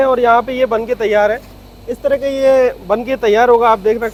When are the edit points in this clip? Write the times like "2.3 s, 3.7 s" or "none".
none